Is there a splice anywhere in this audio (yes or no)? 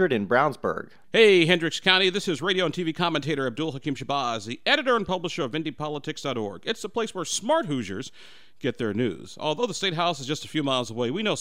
yes